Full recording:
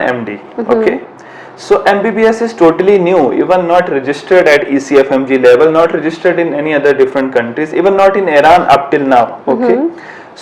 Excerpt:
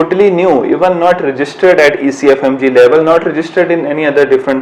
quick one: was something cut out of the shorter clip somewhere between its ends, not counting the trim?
no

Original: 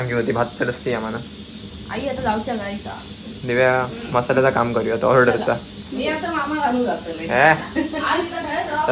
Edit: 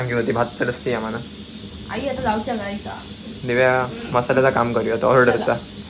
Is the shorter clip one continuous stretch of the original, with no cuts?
yes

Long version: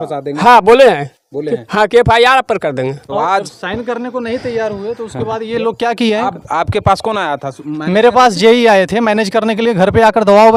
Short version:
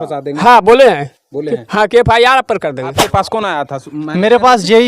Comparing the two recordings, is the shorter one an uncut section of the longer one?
no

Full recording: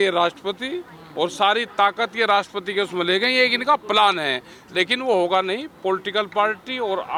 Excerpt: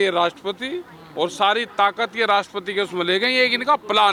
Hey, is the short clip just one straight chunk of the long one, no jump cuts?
yes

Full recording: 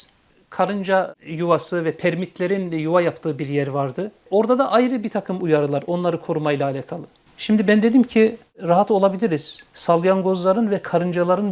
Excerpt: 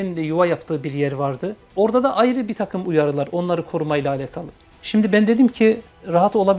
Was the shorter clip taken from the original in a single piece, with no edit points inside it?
yes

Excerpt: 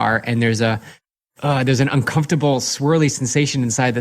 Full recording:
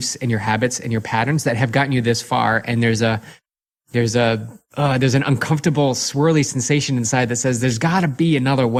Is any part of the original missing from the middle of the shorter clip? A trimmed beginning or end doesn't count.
yes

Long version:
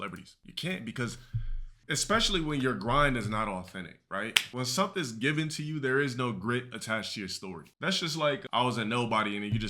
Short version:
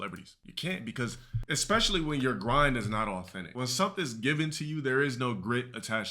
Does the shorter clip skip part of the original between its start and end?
yes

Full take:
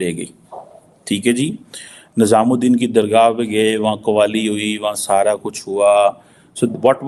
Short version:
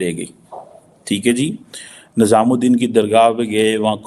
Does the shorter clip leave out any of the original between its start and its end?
no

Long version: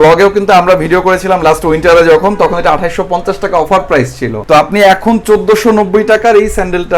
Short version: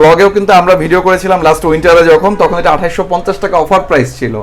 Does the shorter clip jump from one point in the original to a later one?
no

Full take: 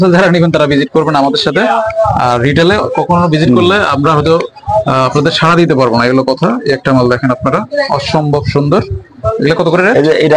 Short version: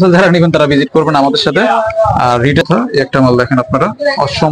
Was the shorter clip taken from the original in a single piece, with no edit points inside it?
no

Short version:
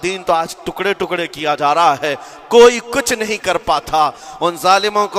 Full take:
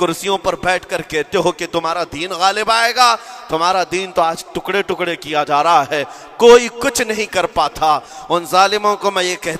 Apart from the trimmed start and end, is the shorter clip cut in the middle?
no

